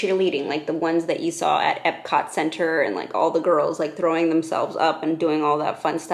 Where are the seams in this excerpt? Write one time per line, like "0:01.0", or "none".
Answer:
none